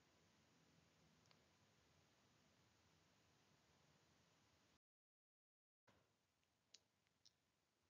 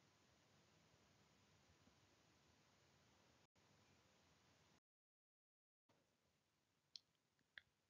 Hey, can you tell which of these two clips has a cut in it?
second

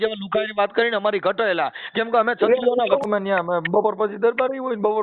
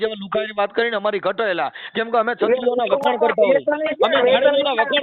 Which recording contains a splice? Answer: first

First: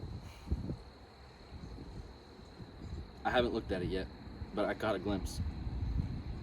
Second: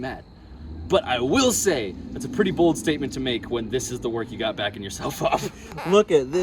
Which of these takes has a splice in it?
second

